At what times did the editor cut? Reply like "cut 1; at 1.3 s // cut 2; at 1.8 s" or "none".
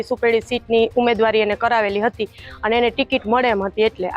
none